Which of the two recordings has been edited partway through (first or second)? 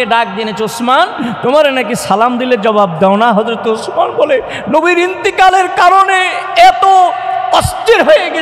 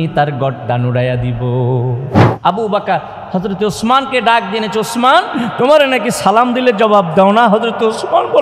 second